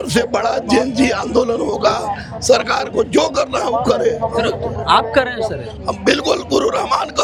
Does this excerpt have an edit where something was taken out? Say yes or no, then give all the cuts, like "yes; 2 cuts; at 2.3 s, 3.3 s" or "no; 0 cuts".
no; 0 cuts